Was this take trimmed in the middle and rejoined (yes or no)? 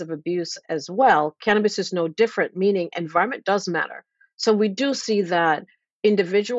no